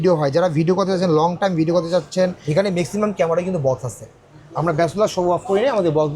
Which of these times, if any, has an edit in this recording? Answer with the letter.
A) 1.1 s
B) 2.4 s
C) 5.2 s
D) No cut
B